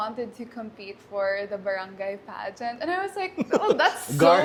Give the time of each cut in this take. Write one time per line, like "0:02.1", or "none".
none